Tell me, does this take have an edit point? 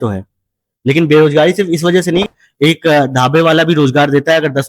yes; 1 cut; at 2.3 s

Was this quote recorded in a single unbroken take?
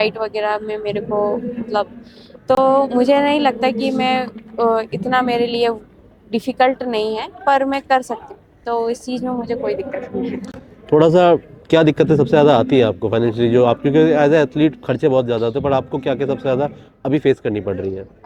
yes; 0 cuts

